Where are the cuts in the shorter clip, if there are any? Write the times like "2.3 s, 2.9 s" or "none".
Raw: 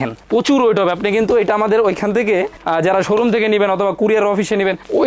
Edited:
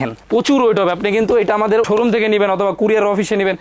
1.8 s